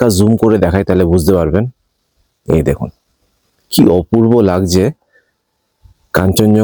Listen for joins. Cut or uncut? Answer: uncut